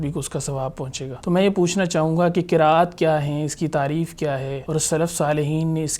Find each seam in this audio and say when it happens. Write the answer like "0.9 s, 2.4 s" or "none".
1.1 s, 4.6 s